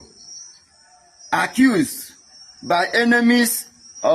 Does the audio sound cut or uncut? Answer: uncut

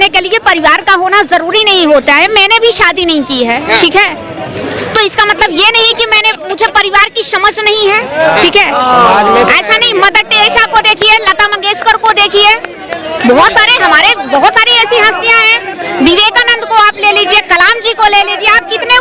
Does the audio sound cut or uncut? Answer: uncut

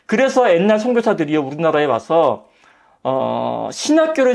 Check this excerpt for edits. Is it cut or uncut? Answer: uncut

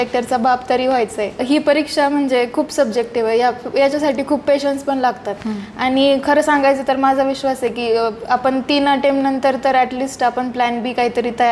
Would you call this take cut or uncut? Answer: cut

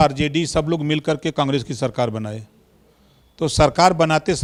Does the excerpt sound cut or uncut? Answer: uncut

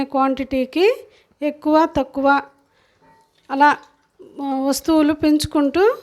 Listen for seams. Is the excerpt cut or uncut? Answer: uncut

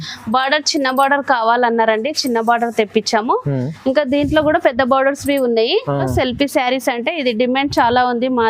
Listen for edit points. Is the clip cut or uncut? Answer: cut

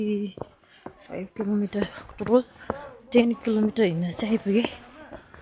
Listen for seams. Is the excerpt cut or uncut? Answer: uncut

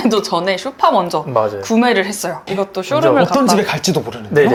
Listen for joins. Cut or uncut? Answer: uncut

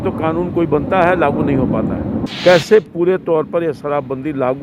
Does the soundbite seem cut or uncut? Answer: cut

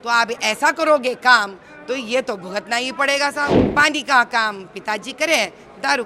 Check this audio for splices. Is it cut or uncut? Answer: cut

